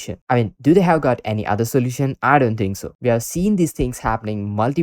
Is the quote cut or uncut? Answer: cut